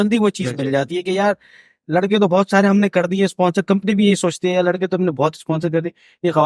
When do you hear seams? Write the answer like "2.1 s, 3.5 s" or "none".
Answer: none

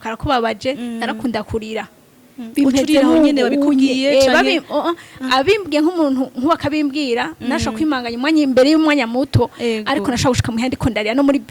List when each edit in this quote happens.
none

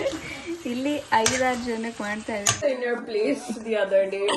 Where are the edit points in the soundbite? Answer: 2.6 s

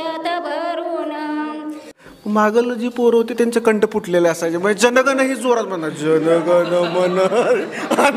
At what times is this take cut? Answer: 1.9 s

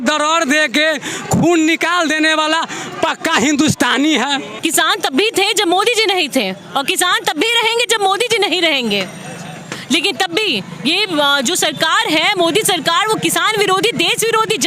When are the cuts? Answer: 4.5 s

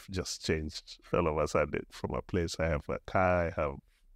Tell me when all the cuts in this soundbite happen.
2.0 s

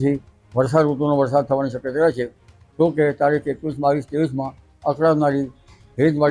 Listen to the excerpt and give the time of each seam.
none

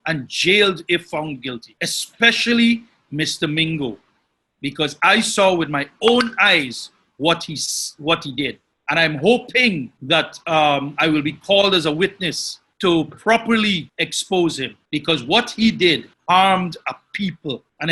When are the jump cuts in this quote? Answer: none

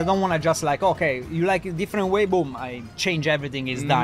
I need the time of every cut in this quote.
none

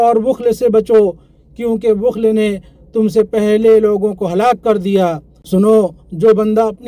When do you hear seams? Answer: 5.4 s

